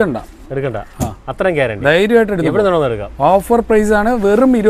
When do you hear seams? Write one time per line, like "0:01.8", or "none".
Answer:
none